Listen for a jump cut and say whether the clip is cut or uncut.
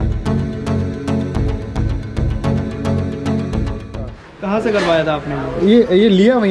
cut